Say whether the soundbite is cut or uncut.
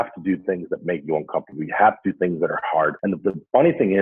cut